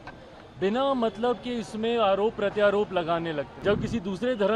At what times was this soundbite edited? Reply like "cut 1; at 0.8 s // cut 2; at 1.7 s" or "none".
cut 1; at 3.5 s